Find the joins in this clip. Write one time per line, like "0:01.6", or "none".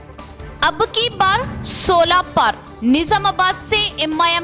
none